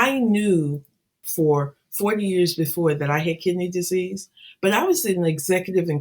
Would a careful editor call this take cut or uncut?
cut